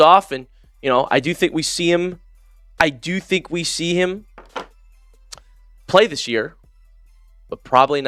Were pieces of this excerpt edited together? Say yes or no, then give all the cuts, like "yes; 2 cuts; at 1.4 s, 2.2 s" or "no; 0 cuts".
no; 0 cuts